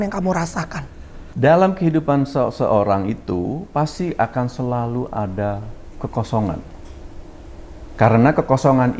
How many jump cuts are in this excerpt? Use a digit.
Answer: 1